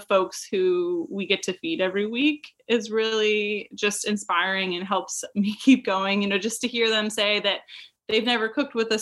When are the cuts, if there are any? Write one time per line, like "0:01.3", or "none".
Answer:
none